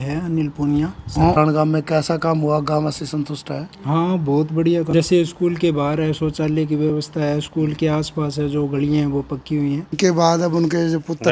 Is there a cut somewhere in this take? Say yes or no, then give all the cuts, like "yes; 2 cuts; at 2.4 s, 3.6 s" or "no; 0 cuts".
yes; 3 cuts; at 1.3 s, 4.9 s, 10.0 s